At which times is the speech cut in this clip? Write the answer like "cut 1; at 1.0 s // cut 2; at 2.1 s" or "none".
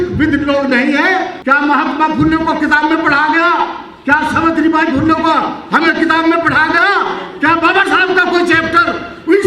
cut 1; at 1.4 s